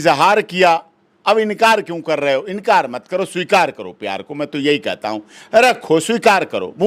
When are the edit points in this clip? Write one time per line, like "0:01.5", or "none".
none